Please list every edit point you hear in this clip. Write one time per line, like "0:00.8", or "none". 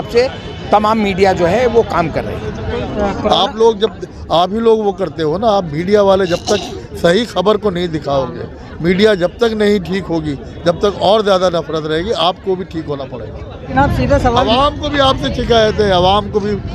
0:02.7
0:13.5